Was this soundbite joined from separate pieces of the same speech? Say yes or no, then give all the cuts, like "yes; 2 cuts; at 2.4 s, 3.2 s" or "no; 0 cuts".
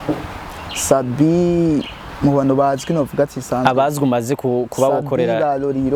no; 0 cuts